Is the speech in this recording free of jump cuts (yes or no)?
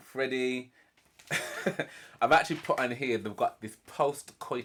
yes